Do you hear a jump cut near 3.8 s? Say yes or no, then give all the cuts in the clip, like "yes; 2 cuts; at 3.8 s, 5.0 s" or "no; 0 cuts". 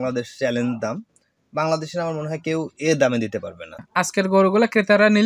yes; 1 cut; at 3.8 s